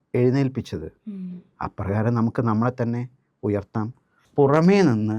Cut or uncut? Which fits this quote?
cut